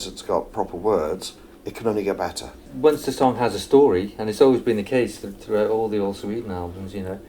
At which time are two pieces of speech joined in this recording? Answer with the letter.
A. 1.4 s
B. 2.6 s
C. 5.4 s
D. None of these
B